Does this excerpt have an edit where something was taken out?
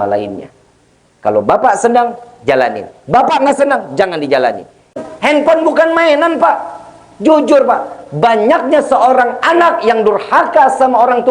yes; 1 cut; at 5.0 s

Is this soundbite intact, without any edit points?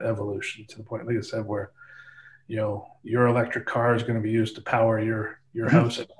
yes; 0 cuts

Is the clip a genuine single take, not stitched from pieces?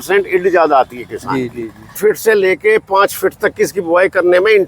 no; 1 cut; at 2.0 s

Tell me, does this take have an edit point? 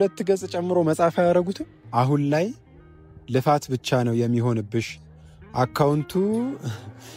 yes; 1 cut; at 2.1 s

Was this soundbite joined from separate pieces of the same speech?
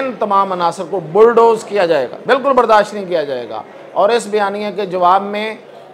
yes; 1 cut; at 2.1 s

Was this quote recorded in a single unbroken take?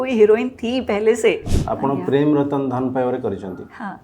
no; 1 cut; at 1.5 s

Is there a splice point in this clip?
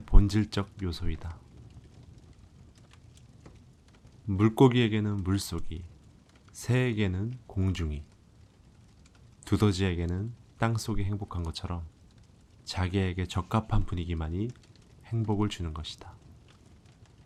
no; 0 cuts

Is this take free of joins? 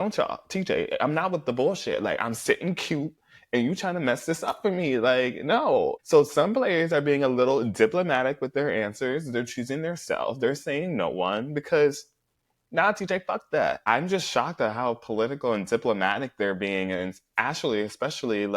no; 2 cuts; at 9.3 s, 13.9 s

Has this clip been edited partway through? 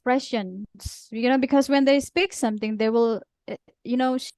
no; 0 cuts

